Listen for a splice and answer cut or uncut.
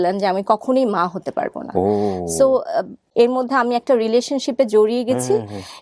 cut